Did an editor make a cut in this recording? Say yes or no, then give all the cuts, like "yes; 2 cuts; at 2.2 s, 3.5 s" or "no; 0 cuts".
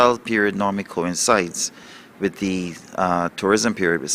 yes; 1 cut; at 1.2 s